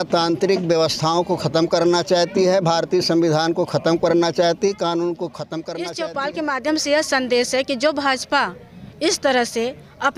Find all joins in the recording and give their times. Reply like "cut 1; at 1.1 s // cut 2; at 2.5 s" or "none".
cut 1; at 5.6 s